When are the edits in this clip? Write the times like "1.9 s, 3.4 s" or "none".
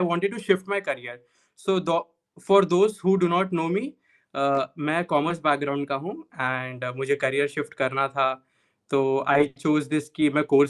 none